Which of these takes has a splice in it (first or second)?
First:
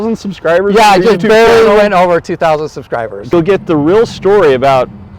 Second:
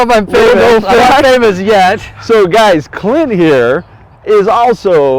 first